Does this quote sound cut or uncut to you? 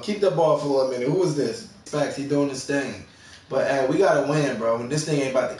cut